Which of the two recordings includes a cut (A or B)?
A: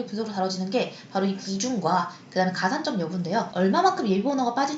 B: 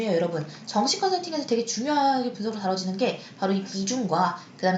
A